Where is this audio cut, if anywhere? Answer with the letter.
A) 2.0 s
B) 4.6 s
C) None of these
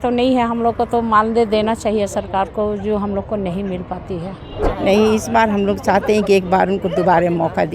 B